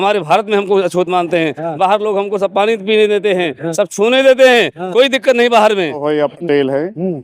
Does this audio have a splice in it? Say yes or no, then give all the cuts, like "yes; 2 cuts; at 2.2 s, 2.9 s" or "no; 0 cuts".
yes; 1 cut; at 6.0 s